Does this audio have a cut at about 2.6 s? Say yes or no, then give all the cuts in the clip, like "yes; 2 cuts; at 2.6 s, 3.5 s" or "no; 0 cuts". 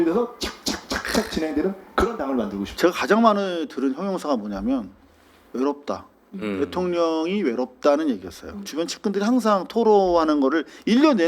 yes; 2 cuts; at 2.6 s, 8.6 s